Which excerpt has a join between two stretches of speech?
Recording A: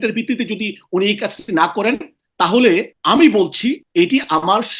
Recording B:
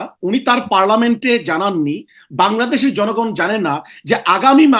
A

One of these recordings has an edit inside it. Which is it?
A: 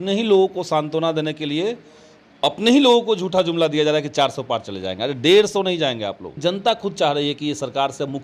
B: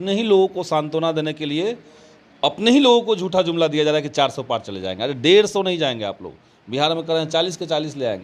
A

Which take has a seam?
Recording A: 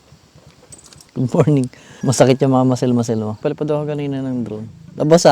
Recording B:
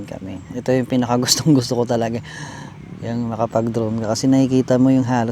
A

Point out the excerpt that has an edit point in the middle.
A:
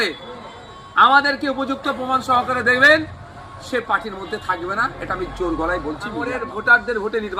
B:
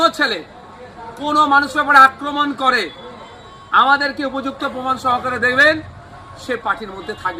A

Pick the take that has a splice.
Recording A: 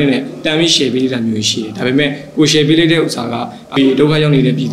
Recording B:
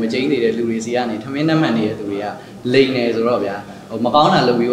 A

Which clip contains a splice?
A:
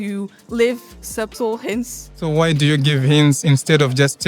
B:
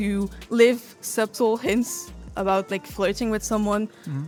A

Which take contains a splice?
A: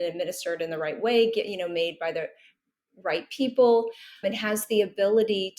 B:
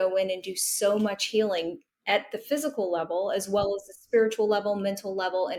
A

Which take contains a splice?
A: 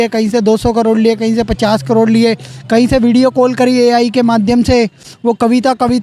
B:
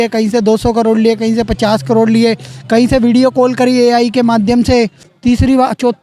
B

